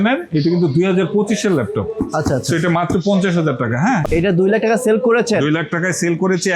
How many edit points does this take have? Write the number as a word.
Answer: one